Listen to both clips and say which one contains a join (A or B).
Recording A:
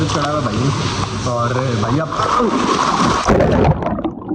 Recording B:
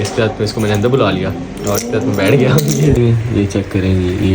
B